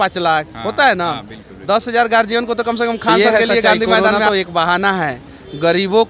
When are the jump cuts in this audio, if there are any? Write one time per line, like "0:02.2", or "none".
0:04.3